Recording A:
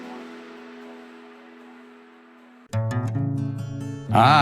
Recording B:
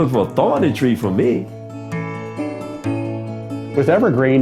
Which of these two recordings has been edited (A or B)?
A